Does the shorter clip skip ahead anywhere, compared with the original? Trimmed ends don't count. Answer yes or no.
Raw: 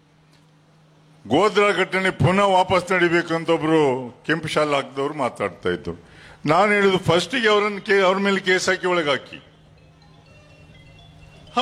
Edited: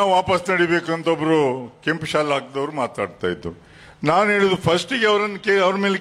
no